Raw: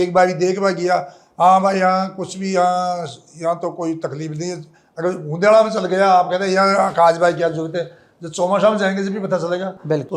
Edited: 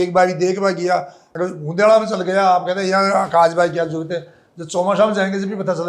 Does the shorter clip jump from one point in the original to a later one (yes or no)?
yes